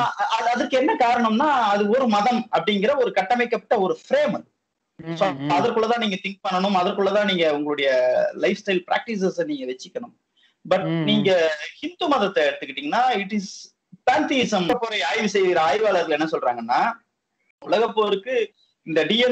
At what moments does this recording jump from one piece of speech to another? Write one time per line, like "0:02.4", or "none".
0:14.7